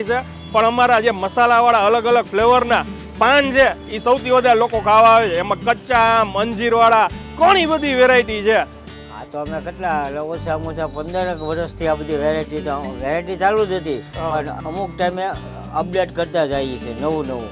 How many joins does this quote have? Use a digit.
1